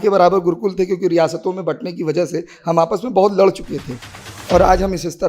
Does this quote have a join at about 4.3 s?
yes; 1 cut; at 4.3 s

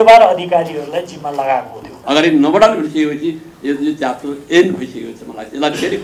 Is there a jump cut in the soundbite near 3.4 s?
no; 1 cut; at 1.9 s

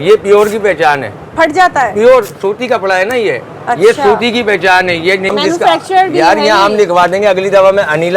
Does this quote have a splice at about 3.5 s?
no; 1 cut; at 5.3 s

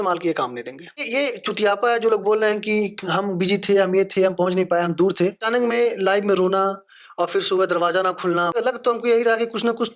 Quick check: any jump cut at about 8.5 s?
yes; 3 cuts; at 1.0 s, 5.4 s, 8.5 s

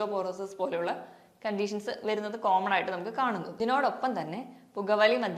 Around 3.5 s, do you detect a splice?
yes; 1 cut; at 3.5 s

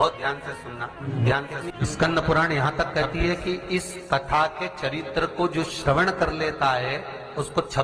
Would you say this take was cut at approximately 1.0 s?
yes; 2 cuts; at 1.0 s, 1.7 s

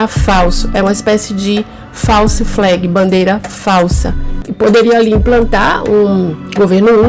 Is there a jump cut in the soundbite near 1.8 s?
no; 1 cut; at 4.4 s

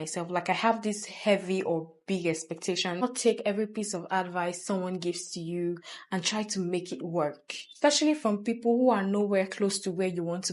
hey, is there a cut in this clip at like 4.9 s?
no; 2 cuts; at 3.0 s, 7.7 s

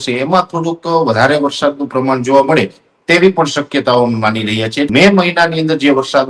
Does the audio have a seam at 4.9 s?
yes; 1 cut; at 4.9 s

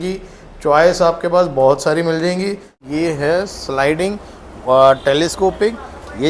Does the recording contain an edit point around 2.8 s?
yes; 1 cut; at 2.8 s

